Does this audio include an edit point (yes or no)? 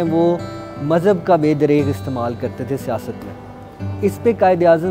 no